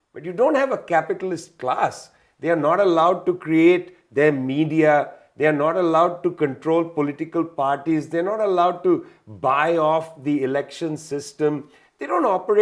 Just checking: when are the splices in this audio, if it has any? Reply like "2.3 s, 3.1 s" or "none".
none